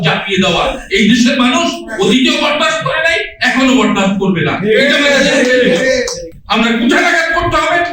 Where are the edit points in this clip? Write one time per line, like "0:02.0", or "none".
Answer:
0:06.3